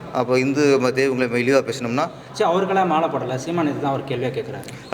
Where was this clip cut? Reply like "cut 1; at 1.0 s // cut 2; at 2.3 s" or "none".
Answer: cut 1; at 2.2 s